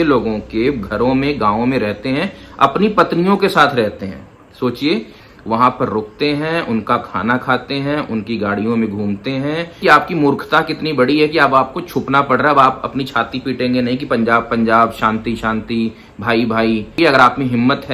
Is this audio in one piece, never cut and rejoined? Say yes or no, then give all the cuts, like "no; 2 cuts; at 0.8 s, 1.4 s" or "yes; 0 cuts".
no; 3 cuts; at 5.2 s, 9.8 s, 16.9 s